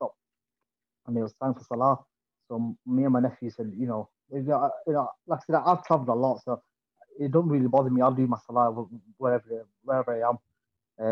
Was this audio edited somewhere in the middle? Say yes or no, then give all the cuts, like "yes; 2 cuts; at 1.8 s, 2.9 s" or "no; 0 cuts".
no; 0 cuts